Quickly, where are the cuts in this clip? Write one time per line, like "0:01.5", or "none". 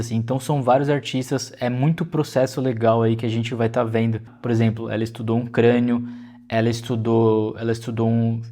0:04.3